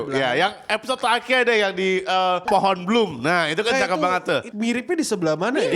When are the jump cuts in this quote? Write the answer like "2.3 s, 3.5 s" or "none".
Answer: 2.4 s, 4.5 s